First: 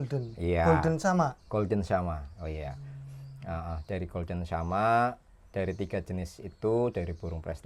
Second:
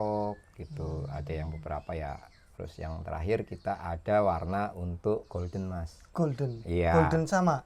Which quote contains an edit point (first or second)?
second